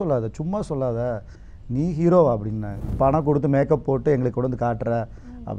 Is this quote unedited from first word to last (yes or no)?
no